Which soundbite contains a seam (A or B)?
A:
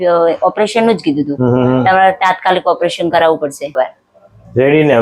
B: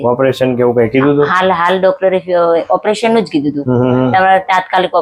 A